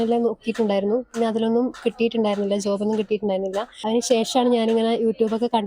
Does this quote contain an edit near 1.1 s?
no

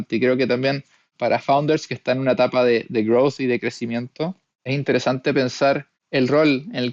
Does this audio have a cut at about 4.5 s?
yes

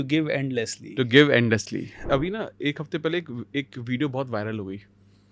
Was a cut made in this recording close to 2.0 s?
yes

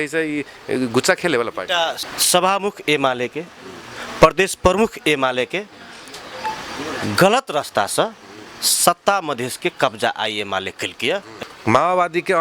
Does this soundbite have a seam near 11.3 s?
yes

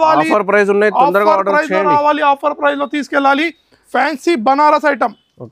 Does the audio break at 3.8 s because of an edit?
yes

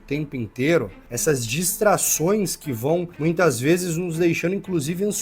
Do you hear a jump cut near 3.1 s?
yes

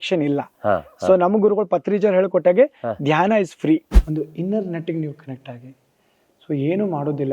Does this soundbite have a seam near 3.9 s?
yes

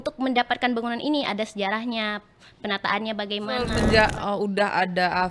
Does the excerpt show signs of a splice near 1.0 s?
no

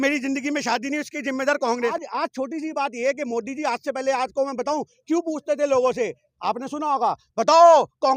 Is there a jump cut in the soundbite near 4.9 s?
no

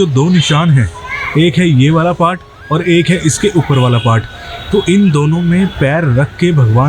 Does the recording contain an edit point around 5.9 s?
no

